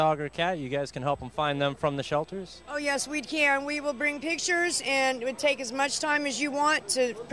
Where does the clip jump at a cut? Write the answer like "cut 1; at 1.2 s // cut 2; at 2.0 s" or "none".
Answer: cut 1; at 2.9 s